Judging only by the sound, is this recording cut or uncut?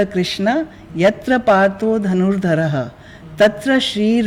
uncut